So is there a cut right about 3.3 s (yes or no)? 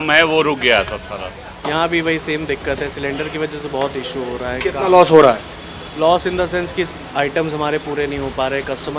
no